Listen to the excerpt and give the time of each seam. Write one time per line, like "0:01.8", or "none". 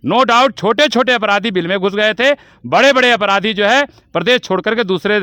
none